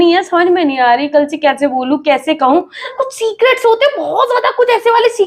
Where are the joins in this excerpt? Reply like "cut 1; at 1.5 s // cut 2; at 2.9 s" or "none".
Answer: cut 1; at 2.9 s